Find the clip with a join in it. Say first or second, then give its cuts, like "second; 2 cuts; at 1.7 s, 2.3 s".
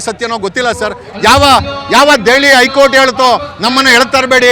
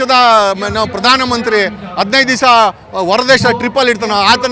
first; 1 cut; at 1.1 s